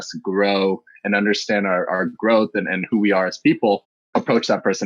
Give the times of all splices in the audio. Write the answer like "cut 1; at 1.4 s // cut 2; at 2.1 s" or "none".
cut 1; at 4.0 s

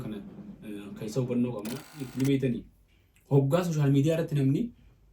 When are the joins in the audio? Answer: cut 1; at 2.1 s

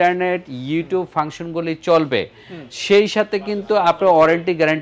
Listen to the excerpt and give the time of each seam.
none

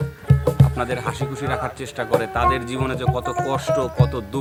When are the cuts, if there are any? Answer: none

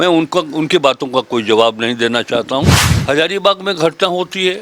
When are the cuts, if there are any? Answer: cut 1; at 2.9 s

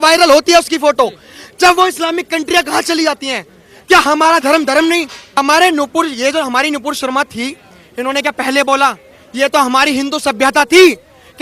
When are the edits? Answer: cut 1; at 5.4 s

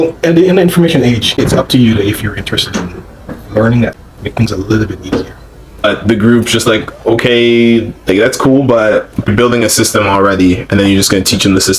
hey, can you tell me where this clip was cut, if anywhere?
cut 1; at 1.3 s // cut 2; at 4.0 s // cut 3; at 5.8 s // cut 4; at 9.3 s

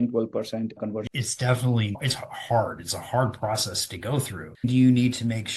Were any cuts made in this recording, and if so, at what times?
cut 1; at 1.1 s // cut 2; at 4.4 s

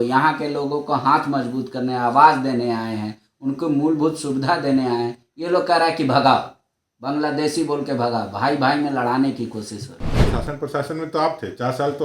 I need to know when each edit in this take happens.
cut 1; at 10.2 s

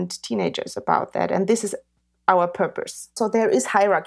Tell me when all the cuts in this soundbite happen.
cut 1; at 3.1 s

